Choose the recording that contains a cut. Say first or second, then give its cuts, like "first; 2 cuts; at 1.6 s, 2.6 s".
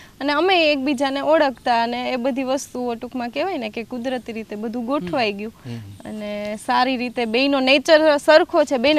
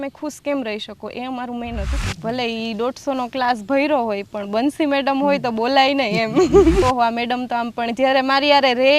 second; 2 cuts; at 2.1 s, 6.8 s